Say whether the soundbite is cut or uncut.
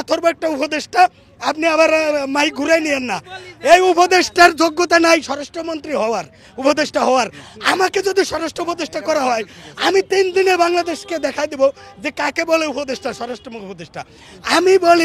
uncut